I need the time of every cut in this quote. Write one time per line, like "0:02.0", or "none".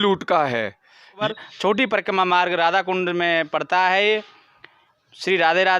0:01.2